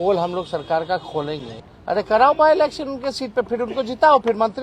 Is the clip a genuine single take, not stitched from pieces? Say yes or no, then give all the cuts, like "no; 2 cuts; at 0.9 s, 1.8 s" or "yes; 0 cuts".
no; 1 cut; at 1.5 s